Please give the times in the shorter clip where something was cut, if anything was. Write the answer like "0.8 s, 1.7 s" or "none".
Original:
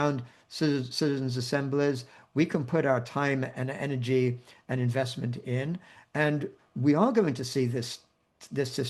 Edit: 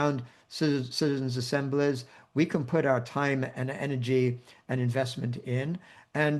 none